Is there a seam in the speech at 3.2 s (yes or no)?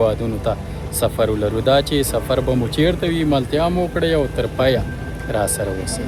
no